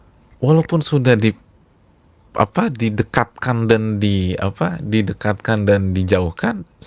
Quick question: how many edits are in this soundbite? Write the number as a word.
zero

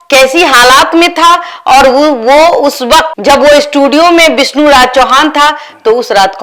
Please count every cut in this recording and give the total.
zero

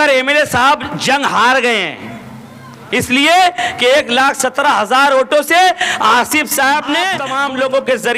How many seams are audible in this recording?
one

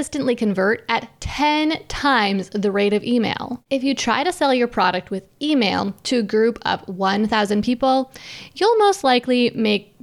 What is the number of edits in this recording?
one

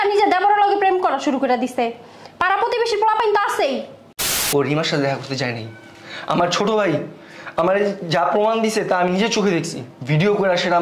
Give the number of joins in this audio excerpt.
one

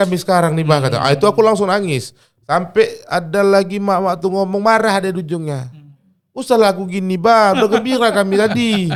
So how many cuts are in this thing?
zero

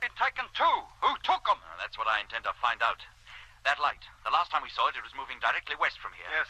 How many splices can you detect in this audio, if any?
one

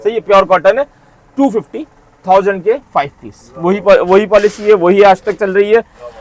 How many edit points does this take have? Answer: zero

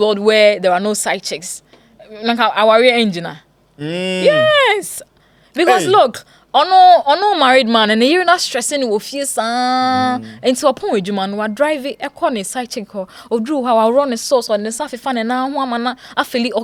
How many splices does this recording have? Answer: zero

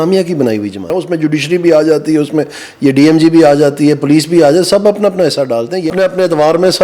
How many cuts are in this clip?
two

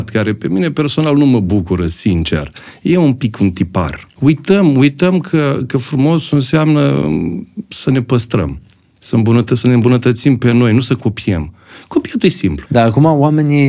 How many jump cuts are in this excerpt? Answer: two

